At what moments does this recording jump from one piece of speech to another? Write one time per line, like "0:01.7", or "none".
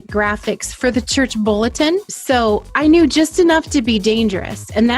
0:02.1